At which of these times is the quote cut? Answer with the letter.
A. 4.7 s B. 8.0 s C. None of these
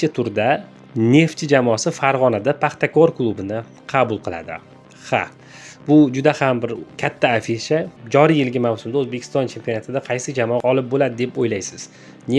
B